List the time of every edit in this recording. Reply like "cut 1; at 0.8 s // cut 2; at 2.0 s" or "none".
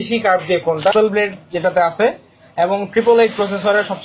cut 1; at 0.9 s